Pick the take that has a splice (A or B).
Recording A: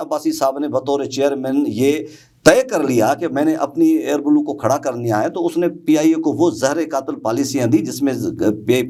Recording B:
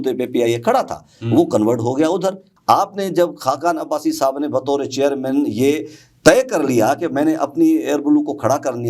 B